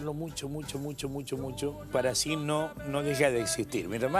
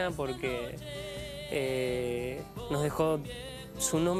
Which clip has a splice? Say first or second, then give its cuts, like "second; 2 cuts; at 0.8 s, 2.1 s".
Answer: first; 1 cut; at 2.5 s